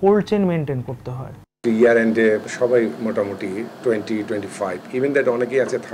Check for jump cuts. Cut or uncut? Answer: cut